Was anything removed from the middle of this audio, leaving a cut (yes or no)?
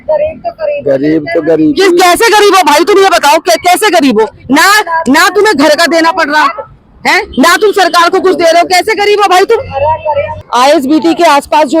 no